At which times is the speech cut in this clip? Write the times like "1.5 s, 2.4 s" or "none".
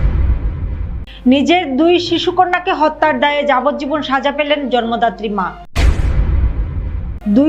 1.0 s